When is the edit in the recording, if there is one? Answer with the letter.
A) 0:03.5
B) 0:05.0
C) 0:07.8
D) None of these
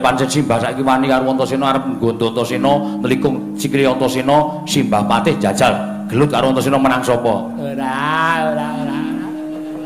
A